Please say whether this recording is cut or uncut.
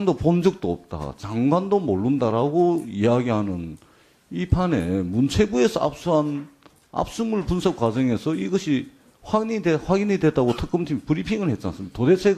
cut